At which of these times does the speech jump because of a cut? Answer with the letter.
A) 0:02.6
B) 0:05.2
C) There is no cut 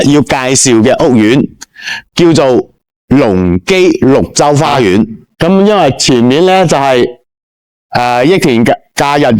B